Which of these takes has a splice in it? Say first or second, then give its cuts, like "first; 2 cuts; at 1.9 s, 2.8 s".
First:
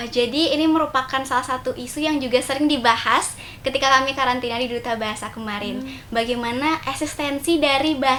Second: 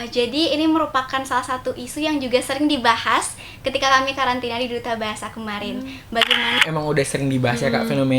second; 1 cut; at 6.6 s